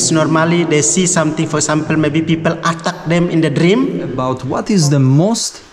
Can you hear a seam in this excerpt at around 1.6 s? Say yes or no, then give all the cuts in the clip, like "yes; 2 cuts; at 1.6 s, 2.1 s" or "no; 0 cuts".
no; 1 cut; at 4.2 s